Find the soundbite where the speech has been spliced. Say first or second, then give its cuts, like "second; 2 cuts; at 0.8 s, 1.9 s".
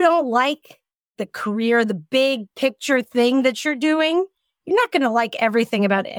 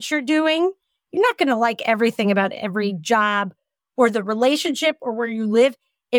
first; 1 cut; at 1.1 s